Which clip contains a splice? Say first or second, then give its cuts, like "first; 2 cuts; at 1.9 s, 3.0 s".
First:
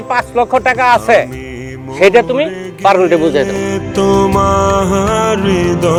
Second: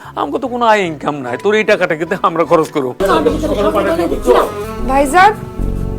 second; 2 cuts; at 3.0 s, 4.6 s